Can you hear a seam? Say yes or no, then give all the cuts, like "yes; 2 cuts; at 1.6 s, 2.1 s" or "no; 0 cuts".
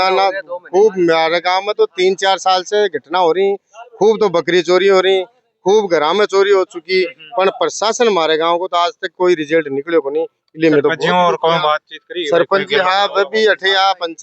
no; 0 cuts